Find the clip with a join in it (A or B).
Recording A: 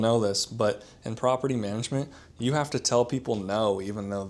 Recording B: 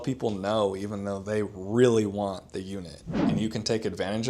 B